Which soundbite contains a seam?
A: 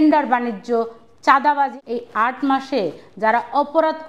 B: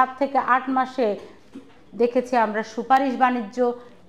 A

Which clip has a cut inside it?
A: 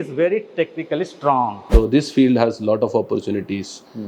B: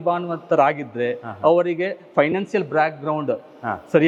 A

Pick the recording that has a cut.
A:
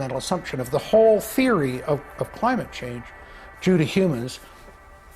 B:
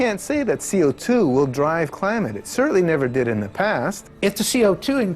B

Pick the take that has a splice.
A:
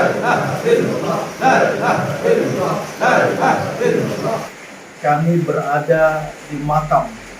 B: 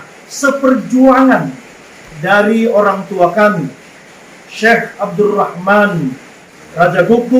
A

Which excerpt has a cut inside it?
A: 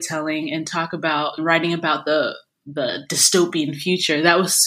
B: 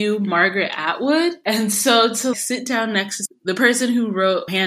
B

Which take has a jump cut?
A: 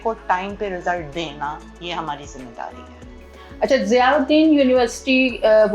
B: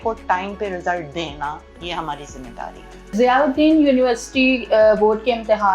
B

